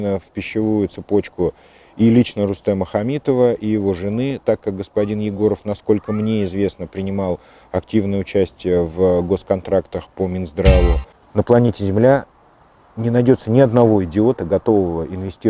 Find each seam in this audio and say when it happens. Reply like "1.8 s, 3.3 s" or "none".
11.1 s